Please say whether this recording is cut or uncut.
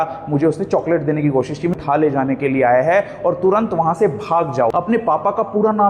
cut